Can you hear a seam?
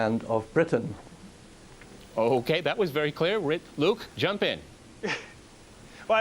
yes; 1 cut; at 3.8 s

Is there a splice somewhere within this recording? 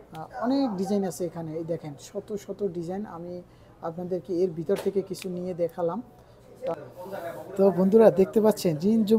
yes; 1 cut; at 6.7 s

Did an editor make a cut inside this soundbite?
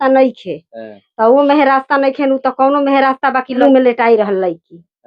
yes; 1 cut; at 3.6 s

